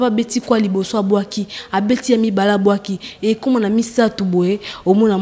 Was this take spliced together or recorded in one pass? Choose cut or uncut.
uncut